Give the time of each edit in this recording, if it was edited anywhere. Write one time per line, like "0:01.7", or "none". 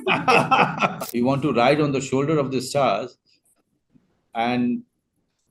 0:01.0